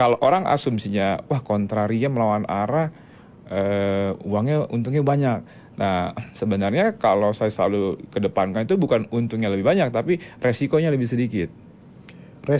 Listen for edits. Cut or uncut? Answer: uncut